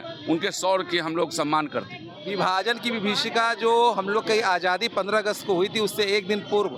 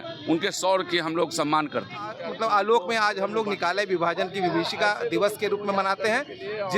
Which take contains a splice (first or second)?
second